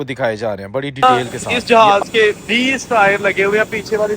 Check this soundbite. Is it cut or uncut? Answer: cut